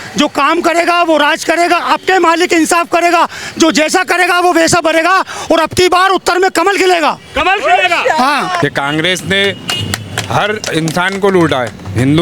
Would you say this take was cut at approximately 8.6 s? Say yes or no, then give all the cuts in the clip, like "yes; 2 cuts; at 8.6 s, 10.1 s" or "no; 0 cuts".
yes; 1 cut; at 8.6 s